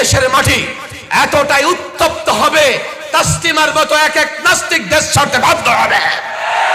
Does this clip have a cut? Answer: no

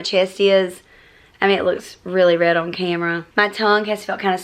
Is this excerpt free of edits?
no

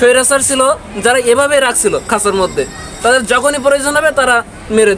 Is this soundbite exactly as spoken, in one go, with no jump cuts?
yes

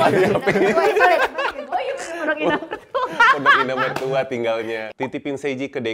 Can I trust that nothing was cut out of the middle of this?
no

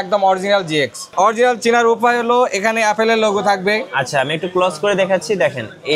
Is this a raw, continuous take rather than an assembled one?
no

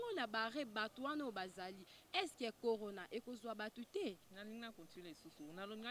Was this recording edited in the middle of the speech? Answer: yes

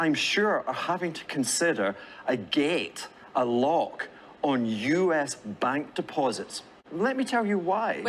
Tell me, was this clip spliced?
no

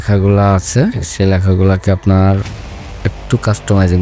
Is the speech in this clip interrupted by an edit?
no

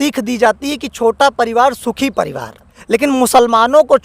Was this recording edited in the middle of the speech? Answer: yes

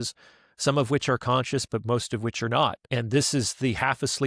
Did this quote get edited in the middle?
yes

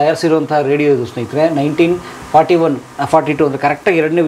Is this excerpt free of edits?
yes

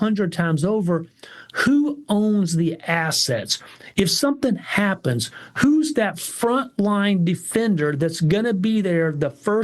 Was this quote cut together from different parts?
no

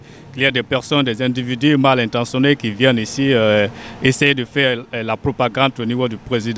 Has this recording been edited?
no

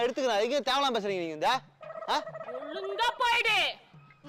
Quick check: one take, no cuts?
yes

